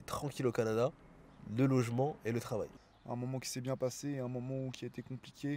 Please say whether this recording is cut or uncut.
cut